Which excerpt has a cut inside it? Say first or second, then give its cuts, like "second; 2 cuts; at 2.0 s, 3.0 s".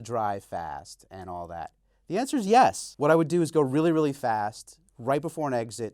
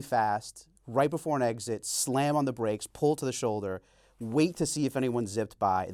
first; 1 cut; at 2.9 s